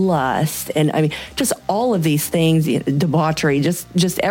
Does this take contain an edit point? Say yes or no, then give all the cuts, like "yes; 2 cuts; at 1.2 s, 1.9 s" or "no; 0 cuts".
no; 0 cuts